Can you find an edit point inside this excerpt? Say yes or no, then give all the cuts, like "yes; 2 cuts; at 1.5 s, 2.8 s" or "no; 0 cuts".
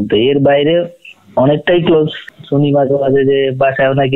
yes; 1 cut; at 2.3 s